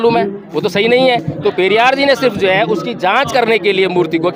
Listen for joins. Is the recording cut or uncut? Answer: uncut